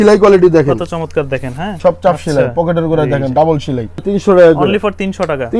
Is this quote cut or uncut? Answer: cut